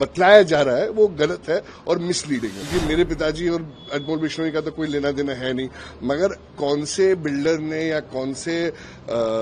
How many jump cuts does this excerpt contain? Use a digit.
1